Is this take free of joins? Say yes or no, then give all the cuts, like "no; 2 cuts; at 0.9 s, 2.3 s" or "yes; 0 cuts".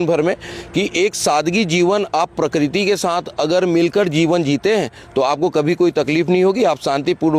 yes; 0 cuts